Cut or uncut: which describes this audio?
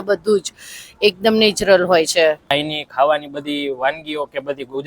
cut